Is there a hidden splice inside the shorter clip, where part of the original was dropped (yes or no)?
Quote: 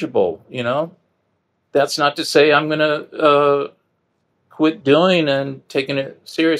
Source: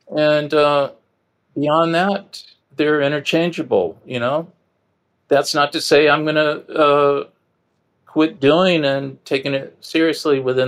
no